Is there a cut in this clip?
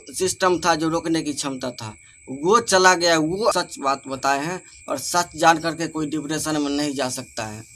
yes; 1 cut; at 3.5 s

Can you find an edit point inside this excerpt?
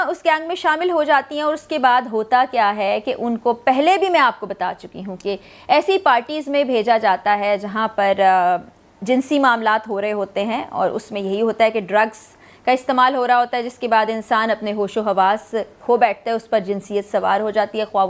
no; 0 cuts

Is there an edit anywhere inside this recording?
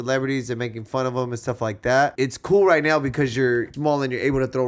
yes; 2 cuts; at 2.1 s, 3.7 s

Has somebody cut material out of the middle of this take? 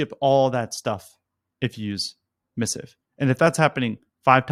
no; 0 cuts

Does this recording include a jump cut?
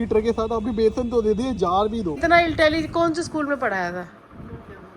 yes; 1 cut; at 2.2 s

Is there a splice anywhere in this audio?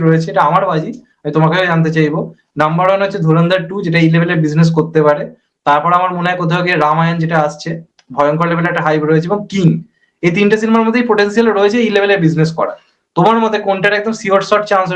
no; 0 cuts

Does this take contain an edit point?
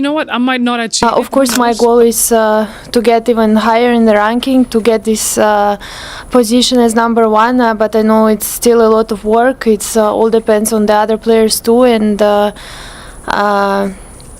yes; 1 cut; at 1.0 s

